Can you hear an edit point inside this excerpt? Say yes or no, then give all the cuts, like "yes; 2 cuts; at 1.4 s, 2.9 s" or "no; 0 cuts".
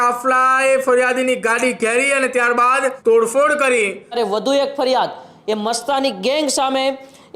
yes; 2 cuts; at 3.0 s, 4.1 s